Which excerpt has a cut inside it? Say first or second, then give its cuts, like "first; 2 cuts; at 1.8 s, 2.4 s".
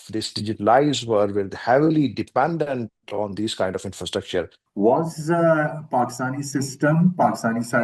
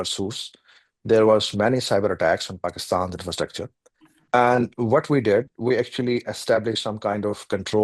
first; 1 cut; at 4.6 s